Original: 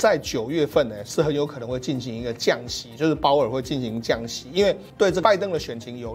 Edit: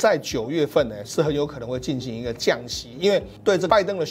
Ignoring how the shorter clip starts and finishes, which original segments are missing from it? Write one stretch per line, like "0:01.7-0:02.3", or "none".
0:02.8-0:04.3